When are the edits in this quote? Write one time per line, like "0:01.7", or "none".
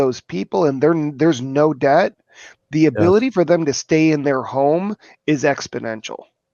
none

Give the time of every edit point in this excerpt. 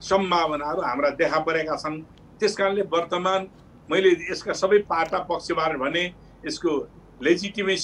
none

